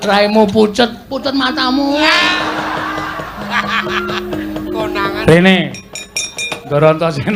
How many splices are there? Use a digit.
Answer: 0